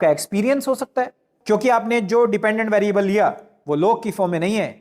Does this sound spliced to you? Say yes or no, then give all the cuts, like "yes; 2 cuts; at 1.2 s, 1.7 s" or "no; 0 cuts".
yes; 1 cut; at 1.3 s